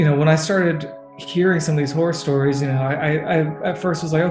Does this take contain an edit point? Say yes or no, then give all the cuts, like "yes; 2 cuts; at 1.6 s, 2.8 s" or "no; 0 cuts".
no; 0 cuts